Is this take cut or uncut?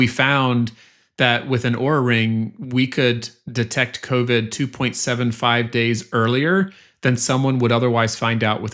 uncut